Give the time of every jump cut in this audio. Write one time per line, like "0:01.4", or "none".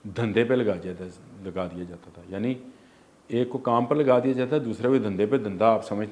none